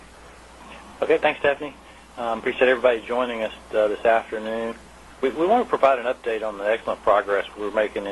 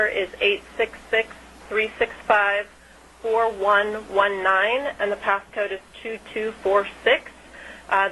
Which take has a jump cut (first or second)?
second